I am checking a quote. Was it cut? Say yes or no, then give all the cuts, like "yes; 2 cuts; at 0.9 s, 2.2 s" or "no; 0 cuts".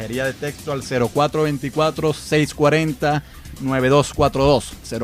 yes; 1 cut; at 1.6 s